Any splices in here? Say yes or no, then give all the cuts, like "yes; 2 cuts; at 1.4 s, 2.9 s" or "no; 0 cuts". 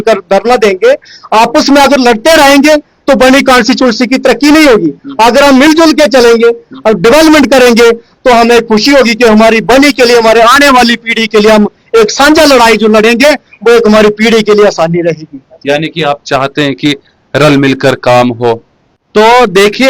no; 0 cuts